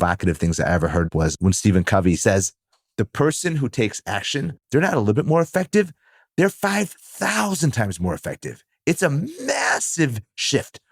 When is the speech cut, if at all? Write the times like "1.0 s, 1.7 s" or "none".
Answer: 1.1 s, 2.2 s, 4.6 s